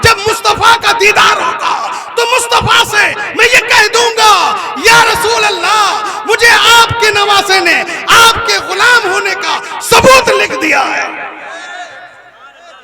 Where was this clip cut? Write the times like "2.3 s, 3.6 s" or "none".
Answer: none